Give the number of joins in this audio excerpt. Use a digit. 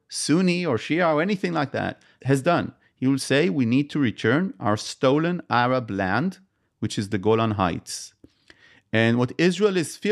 1